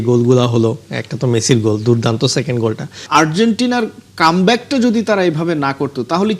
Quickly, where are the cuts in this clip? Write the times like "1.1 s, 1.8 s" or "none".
3.0 s